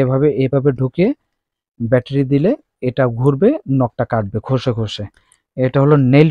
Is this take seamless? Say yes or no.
yes